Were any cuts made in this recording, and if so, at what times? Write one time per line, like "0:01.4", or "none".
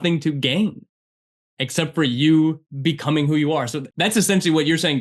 0:02.7
0:03.8